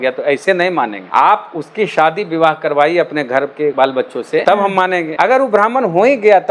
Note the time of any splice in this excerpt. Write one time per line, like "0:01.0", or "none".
0:01.0
0:03.9
0:05.1